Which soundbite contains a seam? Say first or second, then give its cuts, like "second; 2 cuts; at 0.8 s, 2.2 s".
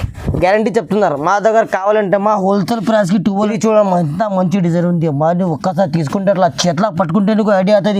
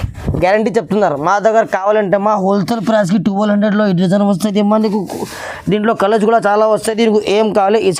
first; 1 cut; at 3.5 s